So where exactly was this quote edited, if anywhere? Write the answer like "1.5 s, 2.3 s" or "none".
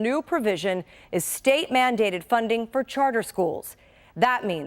2.4 s